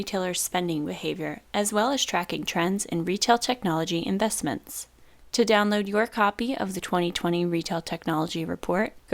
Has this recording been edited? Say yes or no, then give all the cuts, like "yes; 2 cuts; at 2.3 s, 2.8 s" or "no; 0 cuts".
yes; 1 cut; at 5.1 s